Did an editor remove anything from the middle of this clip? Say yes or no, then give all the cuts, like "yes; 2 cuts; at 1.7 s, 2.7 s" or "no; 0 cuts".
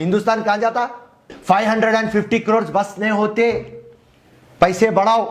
yes; 1 cut; at 1.3 s